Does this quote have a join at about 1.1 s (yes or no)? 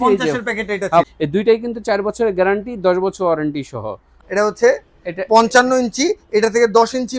yes